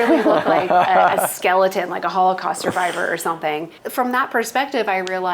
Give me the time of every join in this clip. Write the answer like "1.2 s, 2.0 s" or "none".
3.7 s